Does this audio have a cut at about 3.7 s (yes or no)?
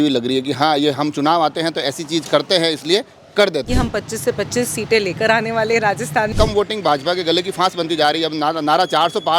yes